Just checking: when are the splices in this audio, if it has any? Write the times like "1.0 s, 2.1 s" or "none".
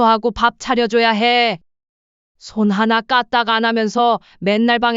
1.6 s